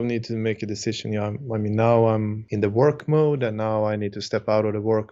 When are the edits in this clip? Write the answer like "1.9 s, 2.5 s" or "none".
2.4 s